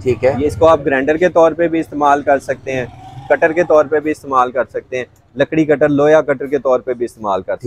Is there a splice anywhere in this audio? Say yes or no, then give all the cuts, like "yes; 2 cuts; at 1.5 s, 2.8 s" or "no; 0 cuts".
no; 0 cuts